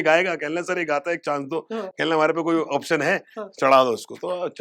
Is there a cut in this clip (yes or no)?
no